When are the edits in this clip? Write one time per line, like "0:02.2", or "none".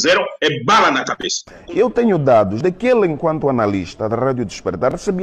0:01.4